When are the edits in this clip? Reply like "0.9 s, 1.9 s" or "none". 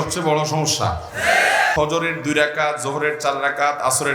1.7 s

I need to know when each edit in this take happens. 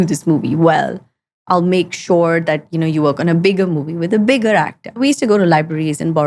5.0 s

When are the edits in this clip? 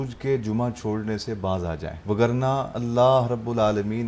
1.9 s, 2.7 s

